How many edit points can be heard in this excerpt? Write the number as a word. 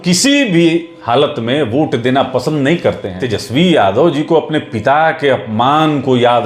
one